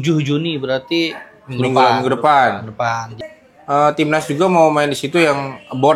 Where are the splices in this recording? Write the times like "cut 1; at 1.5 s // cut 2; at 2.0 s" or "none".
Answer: cut 1; at 3.1 s